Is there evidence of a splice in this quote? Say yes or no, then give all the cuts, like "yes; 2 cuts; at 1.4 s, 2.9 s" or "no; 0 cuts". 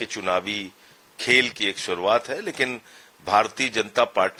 no; 0 cuts